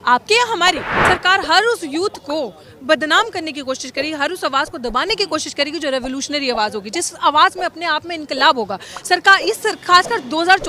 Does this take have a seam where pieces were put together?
yes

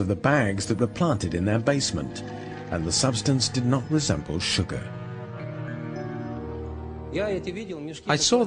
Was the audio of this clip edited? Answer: yes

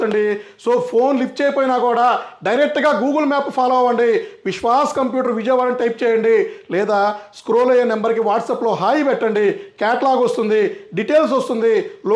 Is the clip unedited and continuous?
yes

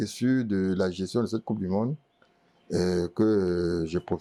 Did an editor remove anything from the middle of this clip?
no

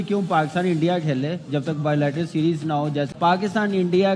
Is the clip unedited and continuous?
no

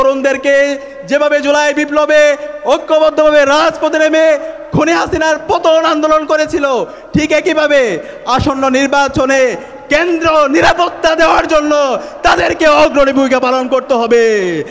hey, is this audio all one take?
yes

